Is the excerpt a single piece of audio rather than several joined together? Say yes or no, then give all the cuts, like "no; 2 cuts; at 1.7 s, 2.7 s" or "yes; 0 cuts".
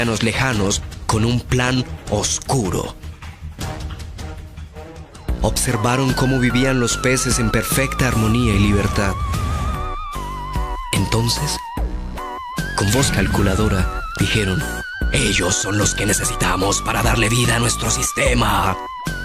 no; 1 cut; at 9.2 s